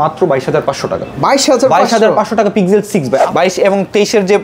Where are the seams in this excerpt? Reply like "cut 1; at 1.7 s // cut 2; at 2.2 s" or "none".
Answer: cut 1; at 3.3 s